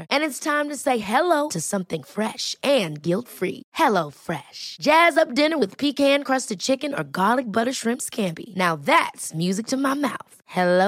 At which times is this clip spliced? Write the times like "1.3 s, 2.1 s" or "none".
none